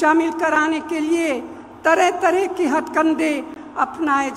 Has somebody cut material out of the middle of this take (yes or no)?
no